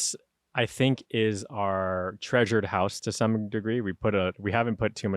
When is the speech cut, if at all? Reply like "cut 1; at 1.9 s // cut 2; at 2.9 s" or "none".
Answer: none